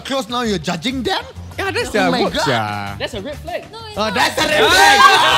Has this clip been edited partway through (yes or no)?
no